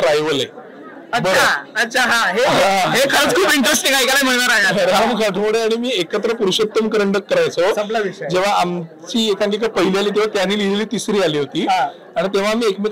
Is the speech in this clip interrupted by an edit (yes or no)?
no